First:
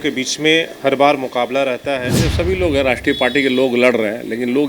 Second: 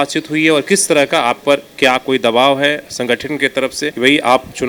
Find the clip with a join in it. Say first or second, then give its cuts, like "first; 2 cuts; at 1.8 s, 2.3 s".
first; 1 cut; at 2.0 s